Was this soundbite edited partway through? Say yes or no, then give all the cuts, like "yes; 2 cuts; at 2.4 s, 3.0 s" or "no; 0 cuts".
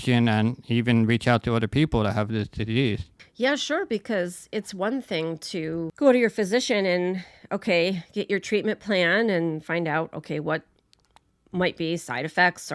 no; 0 cuts